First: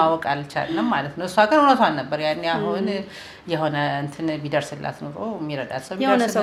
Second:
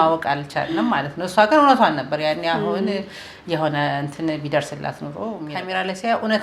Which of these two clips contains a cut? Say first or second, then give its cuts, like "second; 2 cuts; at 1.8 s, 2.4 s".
second; 1 cut; at 5.5 s